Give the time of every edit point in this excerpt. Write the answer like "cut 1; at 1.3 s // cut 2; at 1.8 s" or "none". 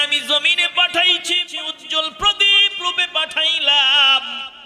cut 1; at 1.4 s